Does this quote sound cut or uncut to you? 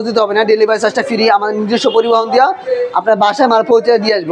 uncut